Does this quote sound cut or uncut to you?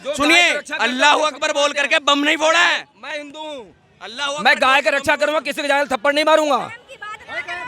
uncut